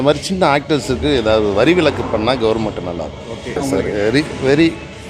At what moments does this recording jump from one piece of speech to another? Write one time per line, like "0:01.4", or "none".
0:03.6